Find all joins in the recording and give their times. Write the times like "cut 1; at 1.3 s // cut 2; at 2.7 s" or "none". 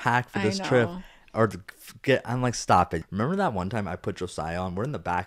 cut 1; at 3.0 s